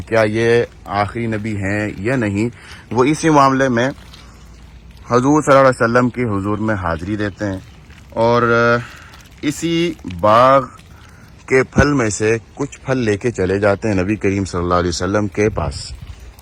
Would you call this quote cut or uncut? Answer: uncut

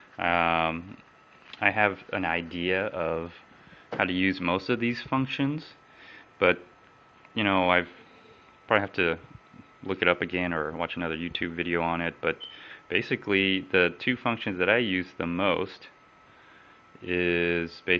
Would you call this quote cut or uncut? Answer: cut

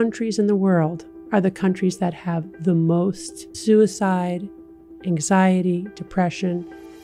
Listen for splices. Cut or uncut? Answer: uncut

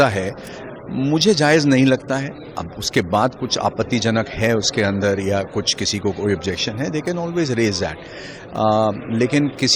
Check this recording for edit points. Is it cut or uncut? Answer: uncut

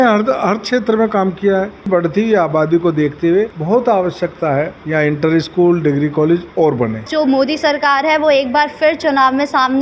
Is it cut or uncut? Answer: cut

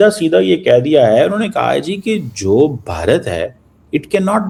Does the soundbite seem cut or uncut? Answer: uncut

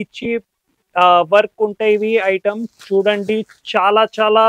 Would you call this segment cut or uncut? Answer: uncut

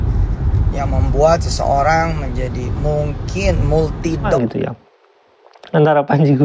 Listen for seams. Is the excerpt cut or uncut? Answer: cut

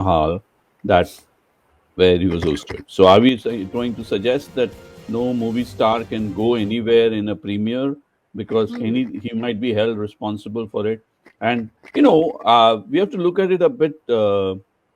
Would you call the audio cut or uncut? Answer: uncut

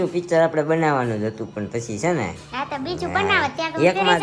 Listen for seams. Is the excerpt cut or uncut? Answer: uncut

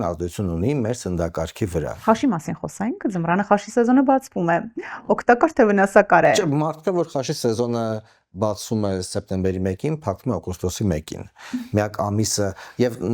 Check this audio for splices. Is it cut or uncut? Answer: cut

